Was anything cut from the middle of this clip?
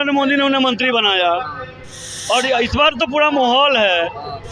no; 0 cuts

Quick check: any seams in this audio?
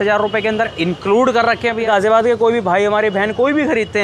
yes; 1 cut; at 1.8 s

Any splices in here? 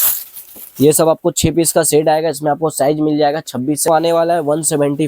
yes; 1 cut; at 3.8 s

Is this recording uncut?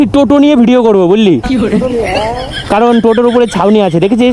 yes; 0 cuts

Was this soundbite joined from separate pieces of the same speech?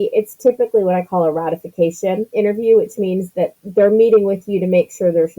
yes; 1 cut; at 2.3 s

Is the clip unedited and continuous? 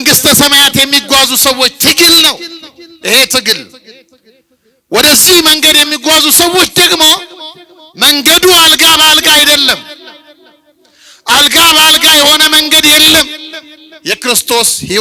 yes; 0 cuts

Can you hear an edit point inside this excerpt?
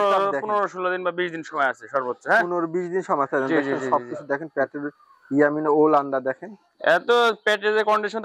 no; 0 cuts

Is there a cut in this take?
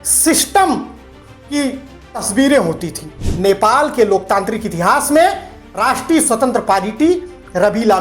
yes; 1 cut; at 3.3 s

